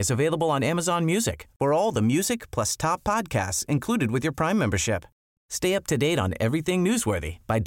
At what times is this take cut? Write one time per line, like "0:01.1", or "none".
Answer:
none